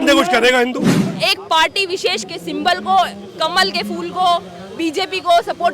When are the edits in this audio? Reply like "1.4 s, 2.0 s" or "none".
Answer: 1.0 s